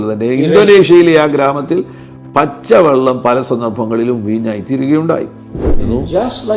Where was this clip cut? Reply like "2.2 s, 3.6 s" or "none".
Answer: 5.6 s